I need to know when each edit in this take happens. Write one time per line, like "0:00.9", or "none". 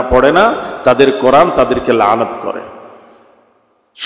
none